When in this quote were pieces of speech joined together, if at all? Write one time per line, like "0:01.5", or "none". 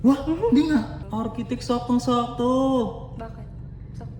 0:01.0